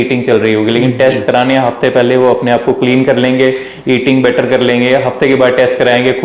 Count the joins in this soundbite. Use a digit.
0